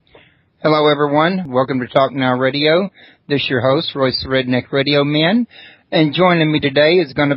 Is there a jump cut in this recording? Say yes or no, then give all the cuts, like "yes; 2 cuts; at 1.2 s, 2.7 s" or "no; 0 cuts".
no; 0 cuts